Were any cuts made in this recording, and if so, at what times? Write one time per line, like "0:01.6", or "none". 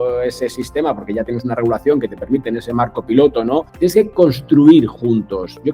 0:03.7